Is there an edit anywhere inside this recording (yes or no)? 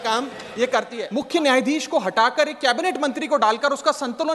yes